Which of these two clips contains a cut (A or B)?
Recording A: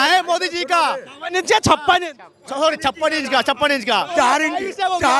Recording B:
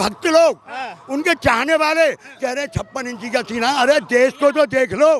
A